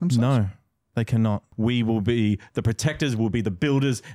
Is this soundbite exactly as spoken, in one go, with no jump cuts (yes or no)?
no